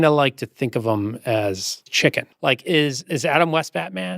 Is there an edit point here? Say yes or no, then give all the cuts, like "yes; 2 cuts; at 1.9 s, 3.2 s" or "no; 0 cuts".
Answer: yes; 2 cuts; at 2.0 s, 3.0 s